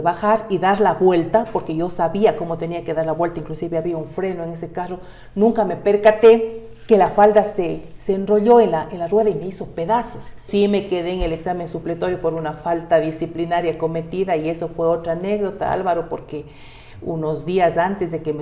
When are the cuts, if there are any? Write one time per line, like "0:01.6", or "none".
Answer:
0:10.4

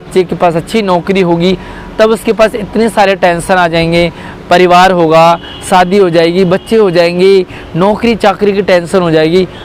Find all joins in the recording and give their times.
none

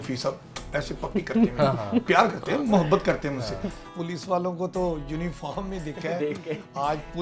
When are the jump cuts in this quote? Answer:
0:03.7

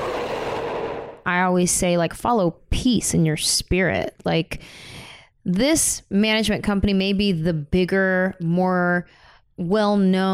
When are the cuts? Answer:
0:01.3

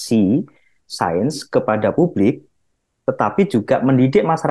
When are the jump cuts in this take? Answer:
none

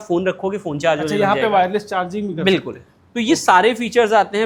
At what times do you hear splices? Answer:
none

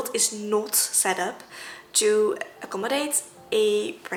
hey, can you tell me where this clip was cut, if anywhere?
none

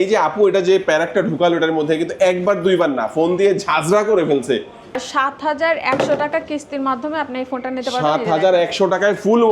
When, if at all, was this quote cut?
0:04.9

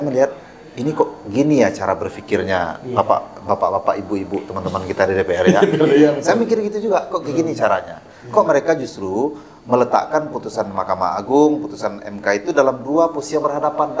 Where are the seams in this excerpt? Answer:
none

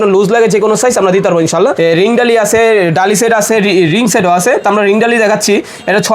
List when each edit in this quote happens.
0:01.8

